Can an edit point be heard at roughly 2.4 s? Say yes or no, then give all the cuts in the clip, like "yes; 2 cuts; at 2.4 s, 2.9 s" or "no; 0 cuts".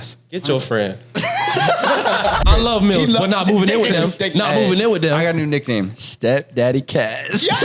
yes; 1 cut; at 2.4 s